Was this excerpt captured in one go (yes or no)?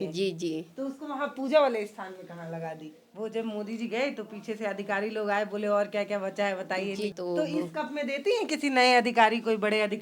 no